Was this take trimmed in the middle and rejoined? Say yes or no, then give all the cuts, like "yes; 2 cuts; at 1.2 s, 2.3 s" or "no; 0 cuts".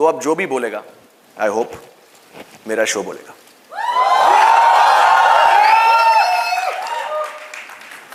no; 0 cuts